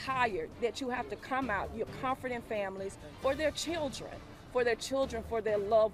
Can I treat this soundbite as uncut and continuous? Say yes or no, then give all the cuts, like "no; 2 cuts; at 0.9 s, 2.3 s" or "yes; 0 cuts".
yes; 0 cuts